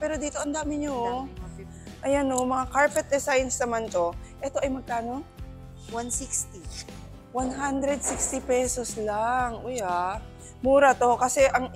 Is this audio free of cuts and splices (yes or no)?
yes